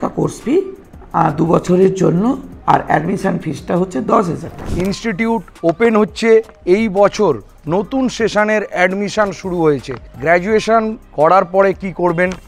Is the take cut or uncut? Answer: cut